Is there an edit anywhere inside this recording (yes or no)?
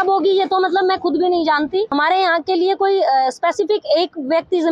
yes